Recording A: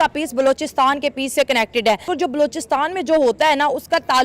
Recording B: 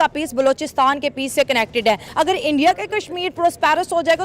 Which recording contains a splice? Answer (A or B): B